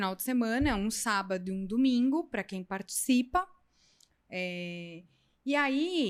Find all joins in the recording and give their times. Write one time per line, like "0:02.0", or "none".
none